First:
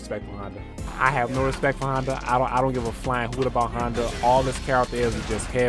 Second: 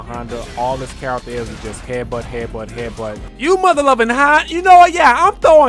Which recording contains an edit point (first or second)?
second